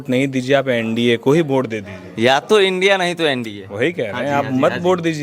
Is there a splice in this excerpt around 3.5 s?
no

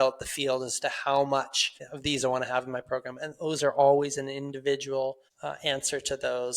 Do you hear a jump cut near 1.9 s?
yes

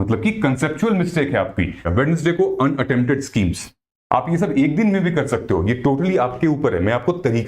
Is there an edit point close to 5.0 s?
no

